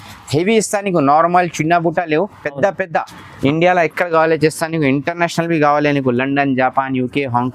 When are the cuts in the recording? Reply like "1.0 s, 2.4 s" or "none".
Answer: 3.3 s